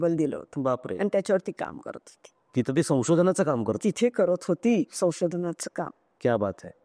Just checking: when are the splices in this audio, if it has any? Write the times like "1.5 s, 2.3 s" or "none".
none